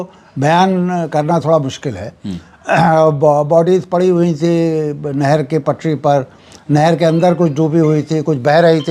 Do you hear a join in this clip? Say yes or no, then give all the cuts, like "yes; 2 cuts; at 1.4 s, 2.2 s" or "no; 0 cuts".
no; 0 cuts